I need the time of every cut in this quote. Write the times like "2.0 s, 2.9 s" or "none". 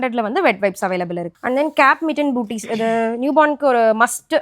1.3 s